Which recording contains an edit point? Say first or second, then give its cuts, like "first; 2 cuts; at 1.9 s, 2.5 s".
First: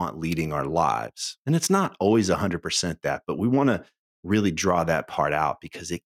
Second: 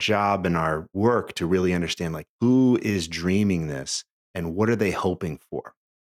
second; 1 cut; at 0.9 s